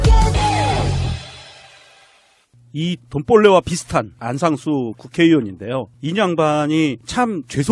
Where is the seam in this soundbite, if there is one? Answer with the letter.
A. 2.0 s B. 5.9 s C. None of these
A